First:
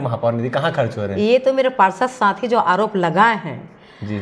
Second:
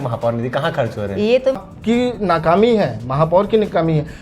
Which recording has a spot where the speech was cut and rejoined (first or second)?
second